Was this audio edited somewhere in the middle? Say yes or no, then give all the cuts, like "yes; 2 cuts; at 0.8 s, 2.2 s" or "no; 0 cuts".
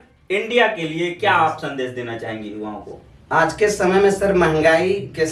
no; 0 cuts